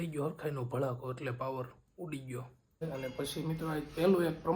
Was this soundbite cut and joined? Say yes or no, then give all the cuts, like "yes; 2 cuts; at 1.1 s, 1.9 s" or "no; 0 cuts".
yes; 1 cut; at 2.8 s